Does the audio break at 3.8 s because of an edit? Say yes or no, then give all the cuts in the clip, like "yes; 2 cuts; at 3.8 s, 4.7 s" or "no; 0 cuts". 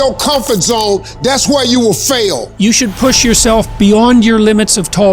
no; 1 cut; at 2.5 s